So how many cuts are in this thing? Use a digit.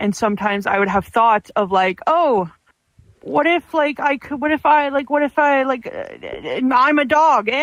0